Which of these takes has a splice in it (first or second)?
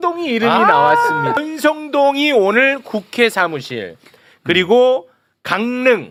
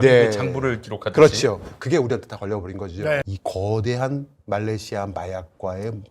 second